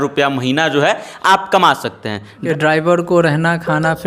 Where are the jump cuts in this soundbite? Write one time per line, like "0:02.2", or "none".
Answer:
0:02.4

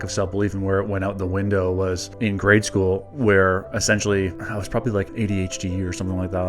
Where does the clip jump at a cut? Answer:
0:05.1

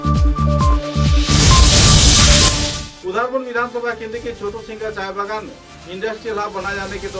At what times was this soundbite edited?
0:02.5

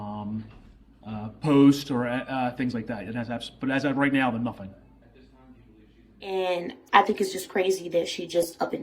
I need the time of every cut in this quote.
0:06.3

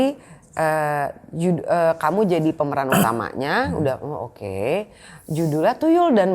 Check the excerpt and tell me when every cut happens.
none

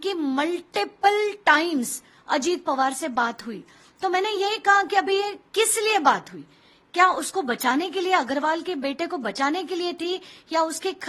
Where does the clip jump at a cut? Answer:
none

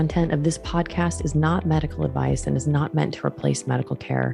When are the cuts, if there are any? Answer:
none

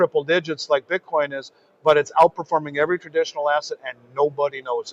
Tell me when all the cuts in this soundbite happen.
none

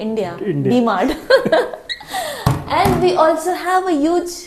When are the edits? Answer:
none

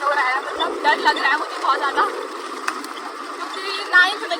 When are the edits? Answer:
none

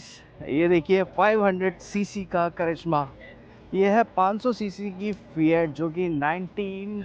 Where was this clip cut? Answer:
none

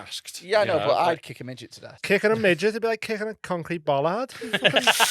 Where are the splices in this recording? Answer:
0:01.9

